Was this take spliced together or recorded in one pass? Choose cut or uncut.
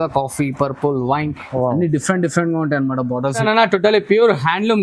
cut